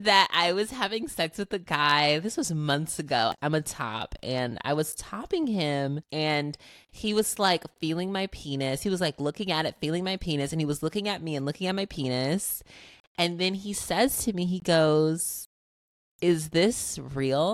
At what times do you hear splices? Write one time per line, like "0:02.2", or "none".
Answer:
0:03.3
0:06.0